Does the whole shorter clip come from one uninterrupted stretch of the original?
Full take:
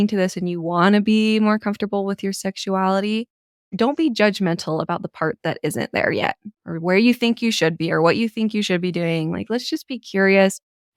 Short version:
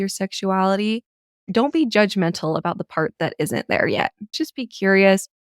no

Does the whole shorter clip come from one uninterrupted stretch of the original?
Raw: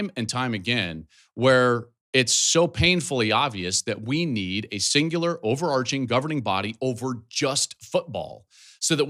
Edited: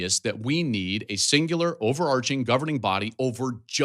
yes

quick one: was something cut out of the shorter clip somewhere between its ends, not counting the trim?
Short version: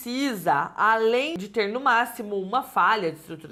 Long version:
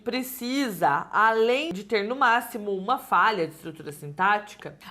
no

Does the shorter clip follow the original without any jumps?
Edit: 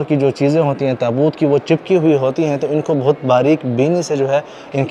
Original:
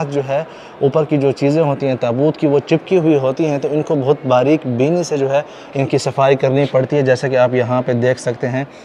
yes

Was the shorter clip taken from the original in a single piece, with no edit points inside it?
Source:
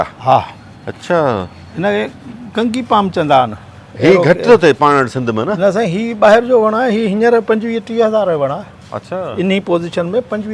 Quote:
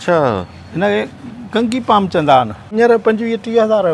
no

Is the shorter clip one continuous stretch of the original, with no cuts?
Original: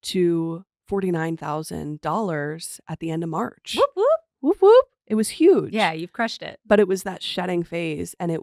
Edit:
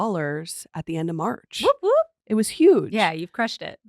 no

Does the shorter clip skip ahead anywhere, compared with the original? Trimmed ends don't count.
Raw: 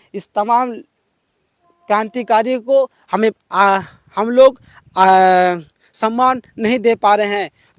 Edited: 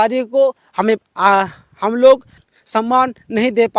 yes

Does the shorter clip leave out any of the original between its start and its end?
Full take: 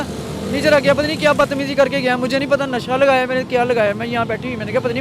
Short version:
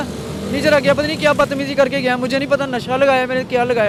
no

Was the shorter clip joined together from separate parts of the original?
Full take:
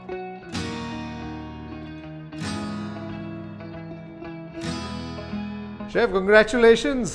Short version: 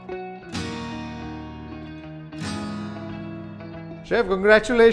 yes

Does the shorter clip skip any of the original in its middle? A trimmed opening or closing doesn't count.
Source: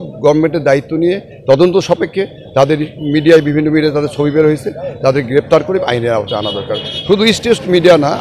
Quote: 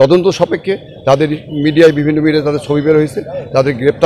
no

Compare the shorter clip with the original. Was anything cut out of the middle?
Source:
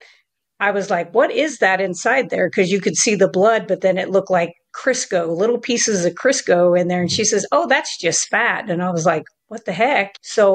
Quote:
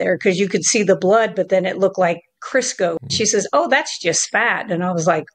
yes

